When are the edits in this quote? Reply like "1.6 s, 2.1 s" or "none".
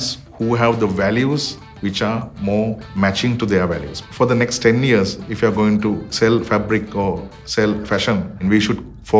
2.8 s, 3.9 s, 8.4 s